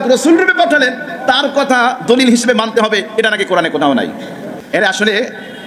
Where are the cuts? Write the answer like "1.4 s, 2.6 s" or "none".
4.6 s

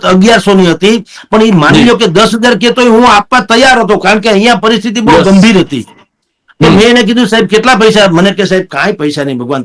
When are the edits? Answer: none

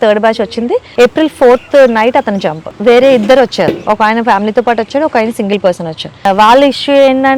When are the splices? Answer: 0.9 s, 1.6 s, 2.6 s, 6.2 s

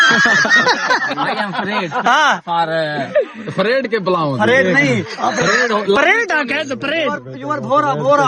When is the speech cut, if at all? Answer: none

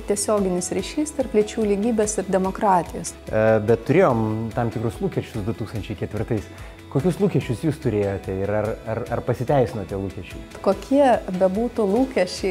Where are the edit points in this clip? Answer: 3.0 s, 10.6 s

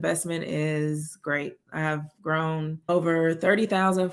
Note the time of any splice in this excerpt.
2.9 s

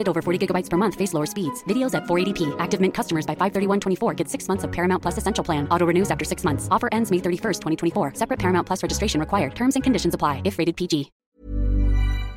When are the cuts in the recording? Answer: 11.3 s

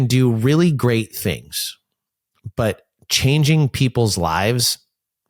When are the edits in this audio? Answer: none

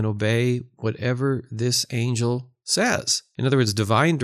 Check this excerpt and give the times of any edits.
3.2 s

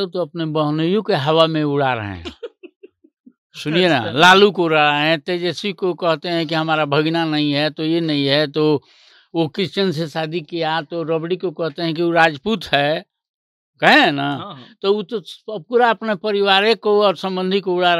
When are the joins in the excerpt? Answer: none

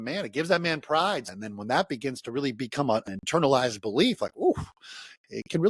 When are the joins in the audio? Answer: 1.3 s, 3.1 s

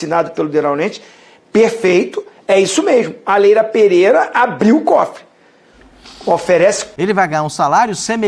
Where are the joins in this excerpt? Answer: 6.9 s

